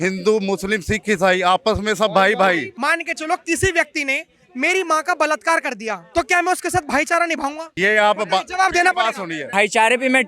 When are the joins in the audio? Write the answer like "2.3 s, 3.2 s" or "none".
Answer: 2.7 s, 6.0 s, 7.7 s, 9.4 s

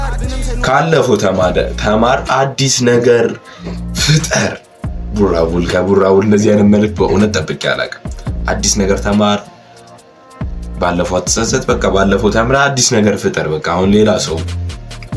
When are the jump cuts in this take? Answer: none

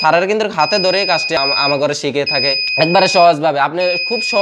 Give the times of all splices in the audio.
1.4 s, 2.6 s

